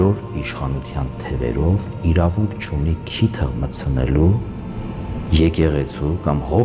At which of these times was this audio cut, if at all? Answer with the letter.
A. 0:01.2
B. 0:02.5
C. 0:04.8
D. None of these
C